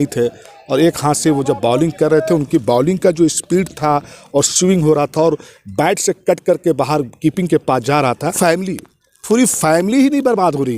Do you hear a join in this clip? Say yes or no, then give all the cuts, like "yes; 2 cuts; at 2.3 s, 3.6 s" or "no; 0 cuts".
yes; 1 cut; at 8.4 s